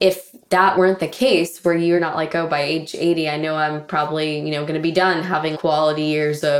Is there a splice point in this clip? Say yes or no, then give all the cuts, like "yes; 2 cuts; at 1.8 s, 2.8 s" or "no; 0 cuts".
yes; 3 cuts; at 0.7 s, 2.0 s, 5.6 s